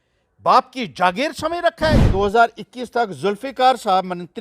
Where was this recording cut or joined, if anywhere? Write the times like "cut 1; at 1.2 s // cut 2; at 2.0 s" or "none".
cut 1; at 2.0 s